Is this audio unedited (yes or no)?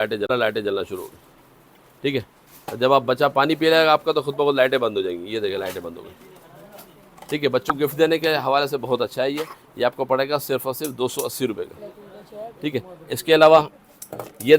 yes